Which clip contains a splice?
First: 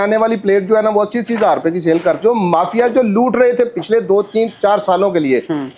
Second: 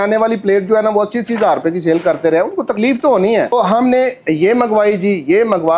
first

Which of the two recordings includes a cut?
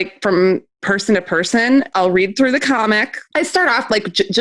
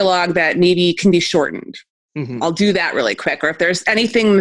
first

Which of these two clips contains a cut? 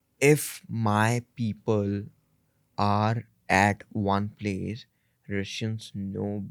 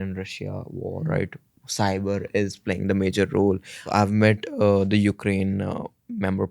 second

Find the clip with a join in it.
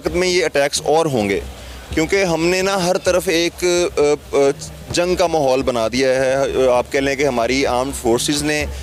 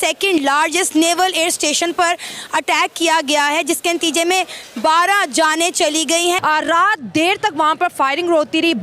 second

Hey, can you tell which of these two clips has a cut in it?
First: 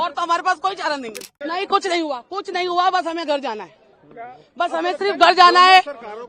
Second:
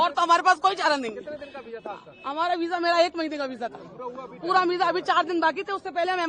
first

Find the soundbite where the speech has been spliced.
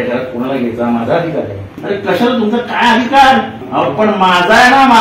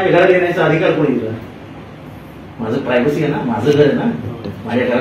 first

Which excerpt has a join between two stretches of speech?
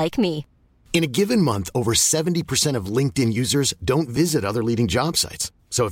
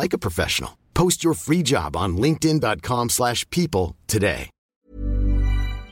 second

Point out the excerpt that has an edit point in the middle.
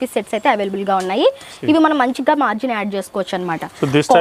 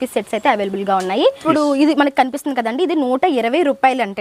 second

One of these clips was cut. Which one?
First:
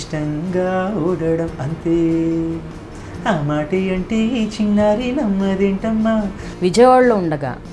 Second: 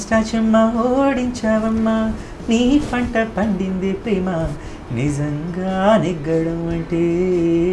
first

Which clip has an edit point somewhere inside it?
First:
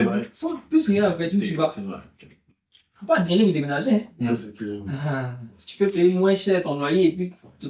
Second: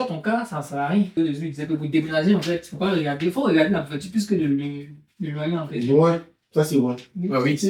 second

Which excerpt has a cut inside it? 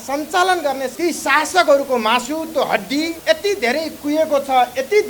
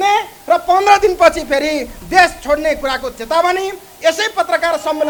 first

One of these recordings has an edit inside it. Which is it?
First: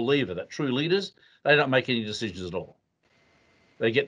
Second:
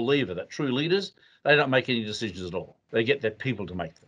second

